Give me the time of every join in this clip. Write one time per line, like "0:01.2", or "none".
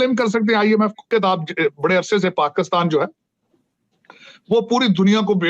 0:01.1